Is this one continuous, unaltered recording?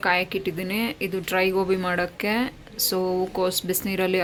yes; 0 cuts

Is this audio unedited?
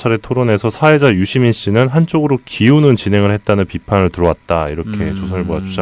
no; 1 cut; at 1.1 s

